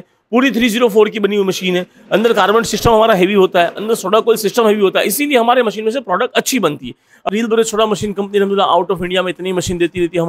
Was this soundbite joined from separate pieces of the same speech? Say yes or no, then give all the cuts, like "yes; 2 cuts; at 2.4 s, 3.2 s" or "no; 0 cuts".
yes; 1 cut; at 7.3 s